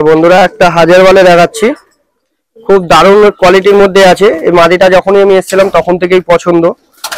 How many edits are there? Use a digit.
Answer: 0